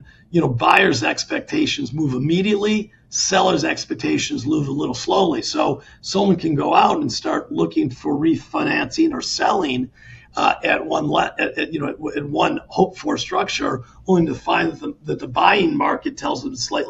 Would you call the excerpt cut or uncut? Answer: uncut